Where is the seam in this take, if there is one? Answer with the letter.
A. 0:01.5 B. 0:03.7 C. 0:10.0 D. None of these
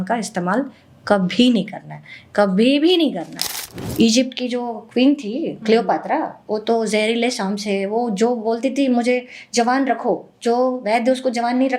B